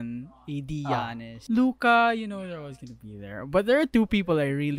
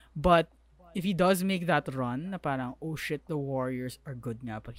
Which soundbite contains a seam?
first; 1 cut; at 1.3 s

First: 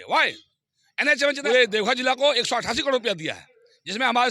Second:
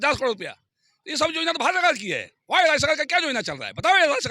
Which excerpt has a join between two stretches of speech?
first; 1 cut; at 1.4 s

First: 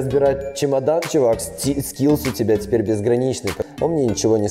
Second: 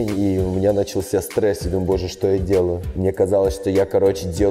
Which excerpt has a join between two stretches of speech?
first; 1 cut; at 3.5 s

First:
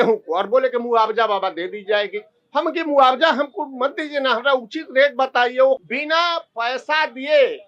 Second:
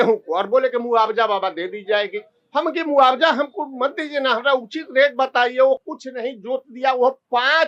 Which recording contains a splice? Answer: first; 1 cut; at 5.9 s

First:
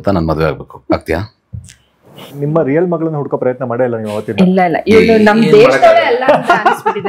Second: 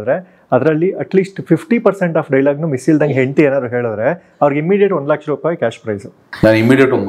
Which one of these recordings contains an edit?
first; 1 cut; at 2.2 s

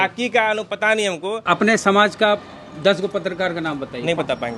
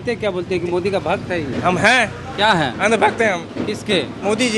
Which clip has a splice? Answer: first; 1 cut; at 1.4 s

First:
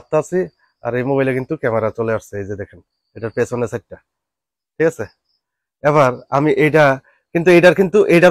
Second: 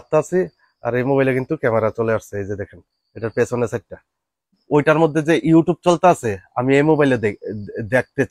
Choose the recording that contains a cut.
second; 1 cut; at 4.6 s

